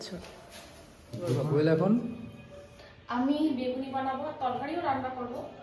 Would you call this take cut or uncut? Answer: cut